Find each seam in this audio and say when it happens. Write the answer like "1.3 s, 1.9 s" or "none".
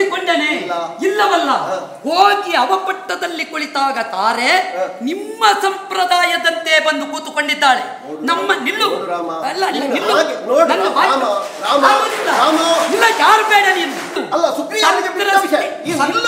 14.2 s